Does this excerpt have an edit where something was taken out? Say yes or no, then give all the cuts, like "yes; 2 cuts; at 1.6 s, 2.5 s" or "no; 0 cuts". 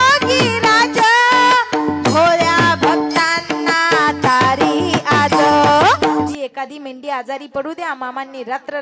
yes; 1 cut; at 6.3 s